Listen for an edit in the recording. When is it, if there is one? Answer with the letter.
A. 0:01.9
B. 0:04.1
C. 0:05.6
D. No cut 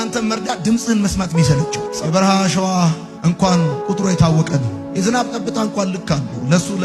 A